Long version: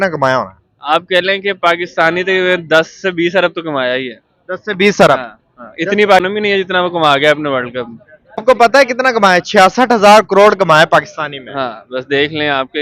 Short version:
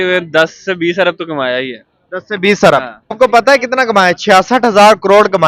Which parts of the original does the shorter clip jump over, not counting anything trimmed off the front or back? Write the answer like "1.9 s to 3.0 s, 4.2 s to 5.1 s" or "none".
5.4 s to 8.3 s